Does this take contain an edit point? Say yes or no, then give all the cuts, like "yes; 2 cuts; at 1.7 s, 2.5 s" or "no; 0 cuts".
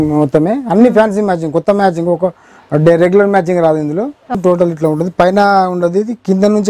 yes; 1 cut; at 4.4 s